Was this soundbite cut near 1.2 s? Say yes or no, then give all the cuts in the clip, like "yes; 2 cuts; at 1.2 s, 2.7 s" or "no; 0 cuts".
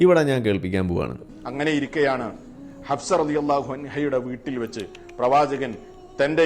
yes; 1 cut; at 1.2 s